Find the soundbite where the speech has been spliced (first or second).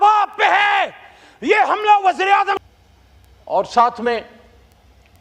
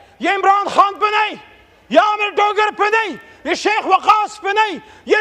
first